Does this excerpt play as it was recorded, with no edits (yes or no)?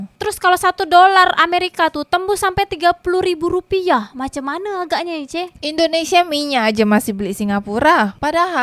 no